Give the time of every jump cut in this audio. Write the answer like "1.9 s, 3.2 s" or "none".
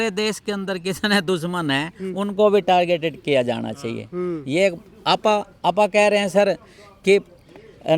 none

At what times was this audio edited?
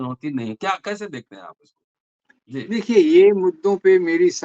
none

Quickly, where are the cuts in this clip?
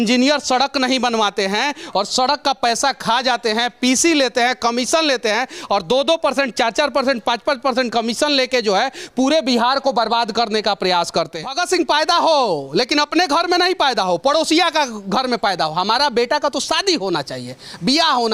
11.5 s

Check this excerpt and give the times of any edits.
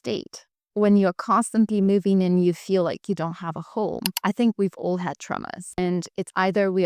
4.0 s, 5.8 s

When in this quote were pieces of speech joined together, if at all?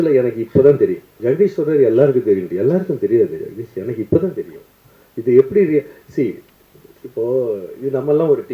1.1 s

